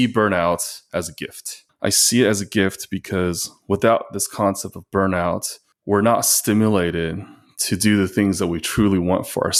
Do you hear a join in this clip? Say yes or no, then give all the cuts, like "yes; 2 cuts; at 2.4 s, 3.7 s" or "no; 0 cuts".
no; 0 cuts